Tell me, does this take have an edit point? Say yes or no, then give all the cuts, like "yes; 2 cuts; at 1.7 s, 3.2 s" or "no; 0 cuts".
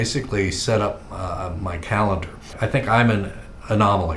yes; 1 cut; at 2.4 s